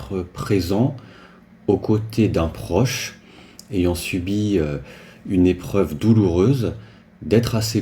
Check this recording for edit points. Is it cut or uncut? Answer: uncut